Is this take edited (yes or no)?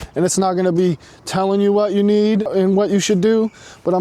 yes